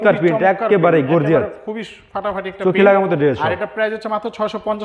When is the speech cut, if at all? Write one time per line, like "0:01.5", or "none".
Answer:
none